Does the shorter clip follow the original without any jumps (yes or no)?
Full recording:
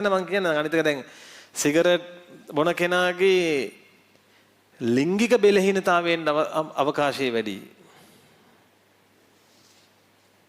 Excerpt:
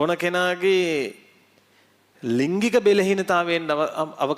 yes